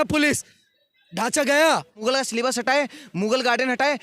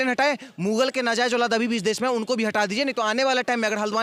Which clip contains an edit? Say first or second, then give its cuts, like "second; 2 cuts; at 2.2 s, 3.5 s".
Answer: first; 1 cut; at 2.0 s